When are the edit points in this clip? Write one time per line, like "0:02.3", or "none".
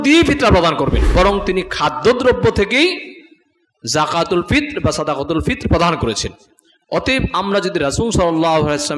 0:01.0

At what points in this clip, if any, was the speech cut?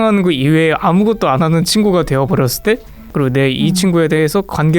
0:03.0

